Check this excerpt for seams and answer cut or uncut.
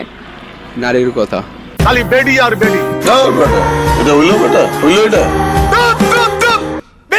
uncut